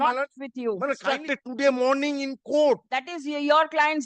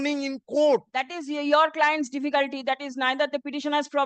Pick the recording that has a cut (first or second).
first